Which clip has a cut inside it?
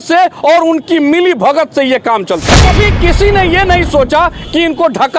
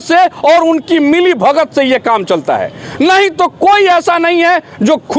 first; 1 cut; at 2.6 s

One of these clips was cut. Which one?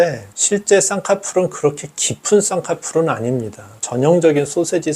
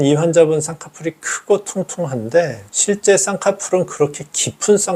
first; 1 cut; at 3.7 s

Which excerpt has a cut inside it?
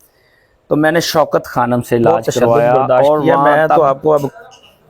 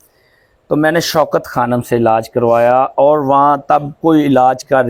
first; 1 cut; at 3.4 s

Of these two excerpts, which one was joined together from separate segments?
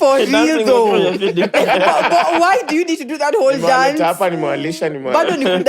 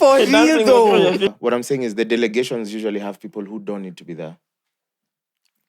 second; 1 cut; at 1.3 s

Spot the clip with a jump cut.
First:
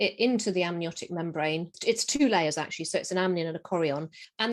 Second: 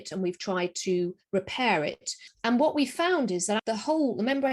second; 1 cut; at 3.6 s

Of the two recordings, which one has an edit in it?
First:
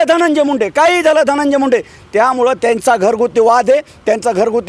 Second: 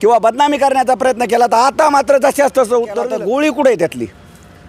second; 1 cut; at 3.1 s

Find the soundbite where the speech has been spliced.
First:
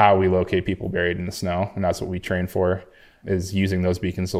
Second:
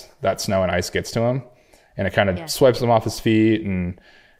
first; 1 cut; at 3.2 s

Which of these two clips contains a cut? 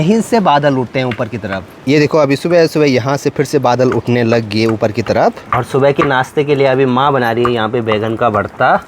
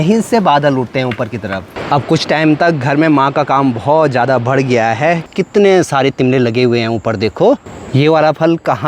second; 3 cuts; at 1.7 s, 5.3 s, 7.7 s

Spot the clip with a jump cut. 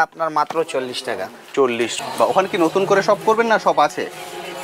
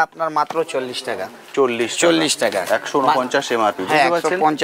first; 1 cut; at 1.9 s

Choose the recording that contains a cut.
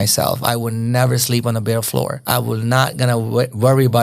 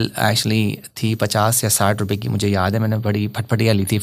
first; 1 cut; at 2.2 s

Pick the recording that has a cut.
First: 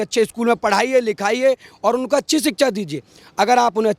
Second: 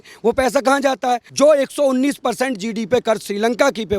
second; 1 cut; at 1.3 s

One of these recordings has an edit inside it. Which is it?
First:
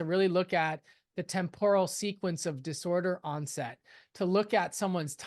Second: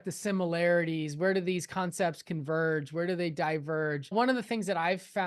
second; 1 cut; at 4.1 s

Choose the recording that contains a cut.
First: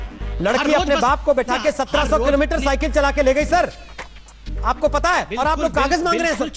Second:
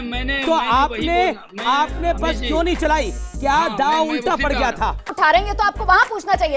second; 1 cut; at 5.1 s

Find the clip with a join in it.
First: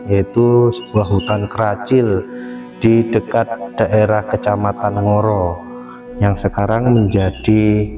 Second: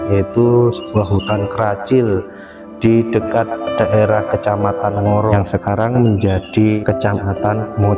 second; 2 cuts; at 5.3 s, 6.8 s

